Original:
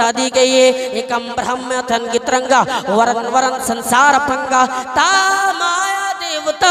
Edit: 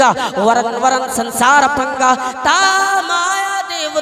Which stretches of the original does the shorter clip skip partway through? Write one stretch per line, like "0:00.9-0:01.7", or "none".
none

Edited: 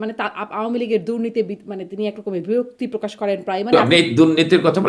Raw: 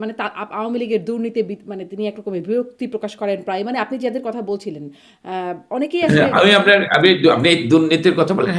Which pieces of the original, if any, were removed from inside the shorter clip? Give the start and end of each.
0:03.7-0:07.3

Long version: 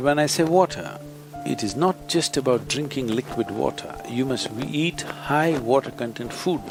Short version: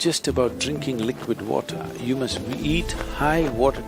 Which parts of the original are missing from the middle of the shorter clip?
none

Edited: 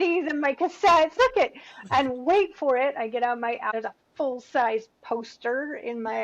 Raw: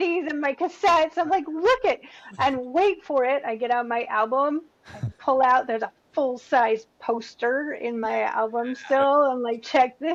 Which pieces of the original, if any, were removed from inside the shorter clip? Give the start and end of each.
0:01.2-0:01.7
0:04.2-0:05.7

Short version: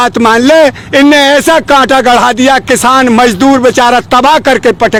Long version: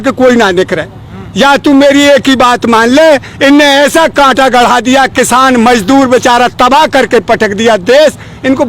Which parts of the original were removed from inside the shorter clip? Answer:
none

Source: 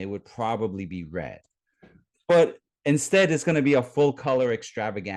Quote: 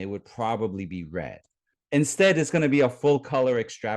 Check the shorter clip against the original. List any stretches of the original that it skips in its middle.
0:01.7-0:02.7

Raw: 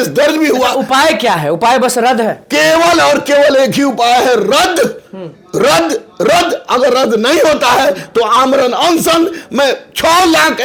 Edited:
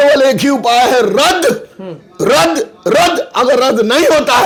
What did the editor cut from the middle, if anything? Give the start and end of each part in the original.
none

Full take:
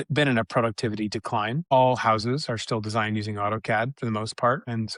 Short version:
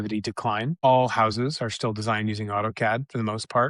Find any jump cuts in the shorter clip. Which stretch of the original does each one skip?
none

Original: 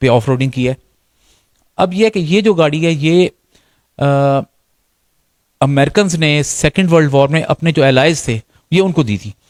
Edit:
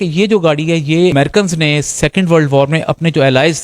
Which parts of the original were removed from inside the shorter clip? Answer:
0:03.3-0:05.7

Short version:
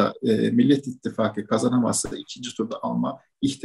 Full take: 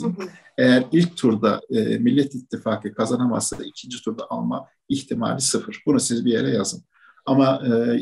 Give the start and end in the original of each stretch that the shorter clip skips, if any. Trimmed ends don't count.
none

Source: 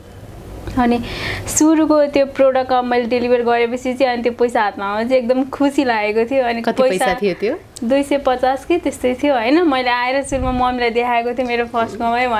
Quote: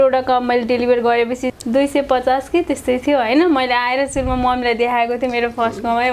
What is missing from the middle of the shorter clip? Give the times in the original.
0:03.9-0:07.6

